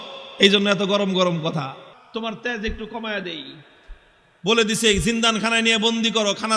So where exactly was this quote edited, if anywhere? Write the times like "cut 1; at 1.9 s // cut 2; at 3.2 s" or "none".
cut 1; at 1.9 s